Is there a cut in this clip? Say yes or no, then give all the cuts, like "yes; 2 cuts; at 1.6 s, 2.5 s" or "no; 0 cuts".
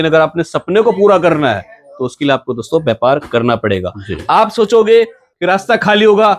yes; 1 cut; at 5.2 s